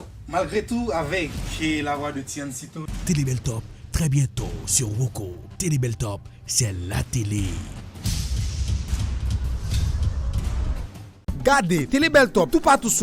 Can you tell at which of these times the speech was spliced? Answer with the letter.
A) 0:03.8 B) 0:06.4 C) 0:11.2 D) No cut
C